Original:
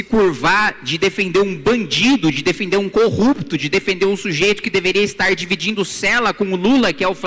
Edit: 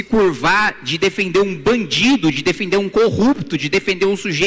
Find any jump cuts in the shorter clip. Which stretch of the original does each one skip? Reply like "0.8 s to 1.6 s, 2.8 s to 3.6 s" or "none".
none